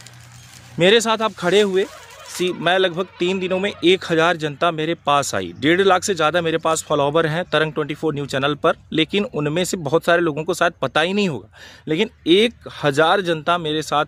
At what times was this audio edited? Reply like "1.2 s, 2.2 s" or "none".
none